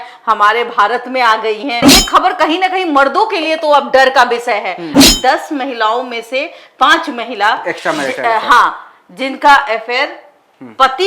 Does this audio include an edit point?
yes; 2 cuts; at 1.9 s, 5.0 s

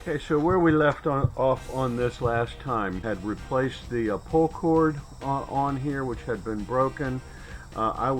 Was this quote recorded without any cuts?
no; 1 cut; at 3.0 s

